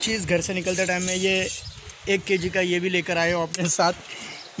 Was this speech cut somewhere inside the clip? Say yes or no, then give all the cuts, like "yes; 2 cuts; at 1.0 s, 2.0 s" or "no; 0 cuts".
no; 0 cuts